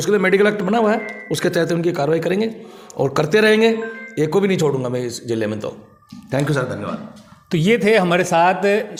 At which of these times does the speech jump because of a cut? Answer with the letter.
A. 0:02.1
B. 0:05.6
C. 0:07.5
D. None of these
D